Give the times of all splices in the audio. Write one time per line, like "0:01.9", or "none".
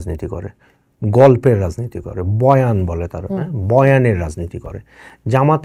none